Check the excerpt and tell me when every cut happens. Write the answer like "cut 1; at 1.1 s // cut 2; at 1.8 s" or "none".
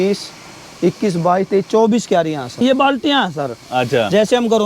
cut 1; at 2.6 s